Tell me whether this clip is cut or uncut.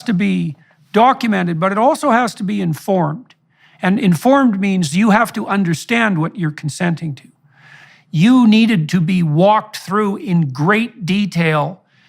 cut